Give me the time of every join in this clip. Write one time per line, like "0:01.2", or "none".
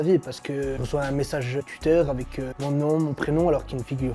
none